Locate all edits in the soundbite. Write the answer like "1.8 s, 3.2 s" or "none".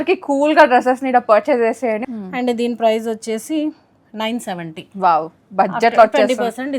2.0 s